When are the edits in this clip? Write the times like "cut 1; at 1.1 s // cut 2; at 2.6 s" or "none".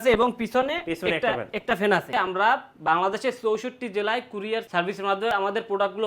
cut 1; at 2.1 s // cut 2; at 5.1 s

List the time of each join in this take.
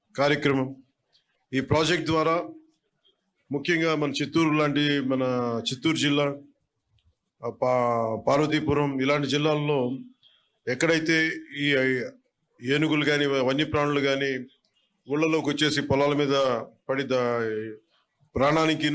none

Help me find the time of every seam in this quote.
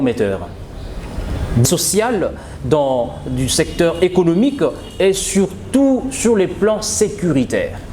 cut 1; at 1.6 s

